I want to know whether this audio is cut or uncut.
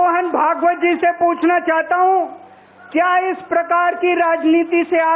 uncut